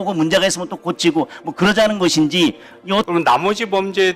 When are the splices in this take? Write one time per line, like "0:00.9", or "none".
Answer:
0:03.1